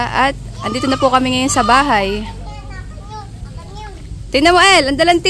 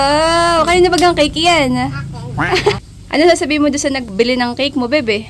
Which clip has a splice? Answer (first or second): second